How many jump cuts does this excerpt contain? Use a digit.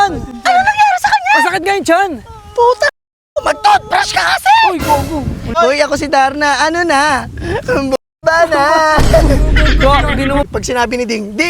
2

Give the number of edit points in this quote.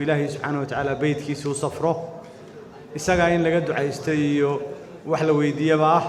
0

